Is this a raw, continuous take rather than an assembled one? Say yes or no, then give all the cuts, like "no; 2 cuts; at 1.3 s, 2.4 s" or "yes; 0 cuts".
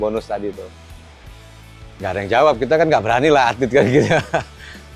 yes; 0 cuts